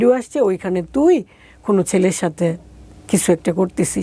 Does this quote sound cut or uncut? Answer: uncut